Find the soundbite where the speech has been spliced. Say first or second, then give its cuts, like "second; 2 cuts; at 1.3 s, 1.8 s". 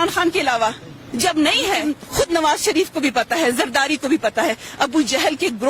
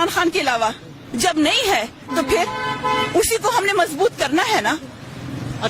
first; 1 cut; at 2.0 s